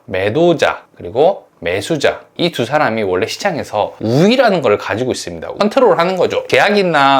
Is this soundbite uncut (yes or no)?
no